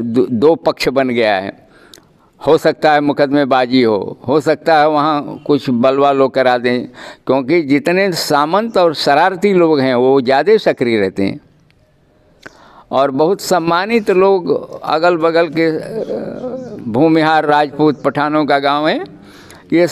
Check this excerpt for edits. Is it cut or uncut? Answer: uncut